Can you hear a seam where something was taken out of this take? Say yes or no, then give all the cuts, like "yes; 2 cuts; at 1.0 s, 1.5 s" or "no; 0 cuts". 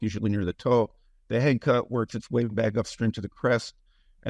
no; 0 cuts